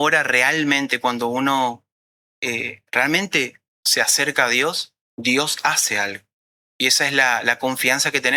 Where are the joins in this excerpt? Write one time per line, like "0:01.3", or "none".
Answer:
none